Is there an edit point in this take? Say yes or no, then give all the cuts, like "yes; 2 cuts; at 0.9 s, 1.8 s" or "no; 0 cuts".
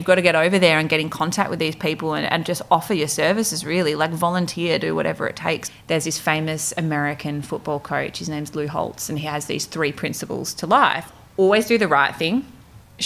yes; 2 cuts; at 5.7 s, 11.1 s